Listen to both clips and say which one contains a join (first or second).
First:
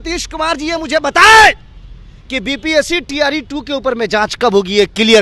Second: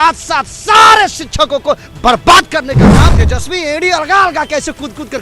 second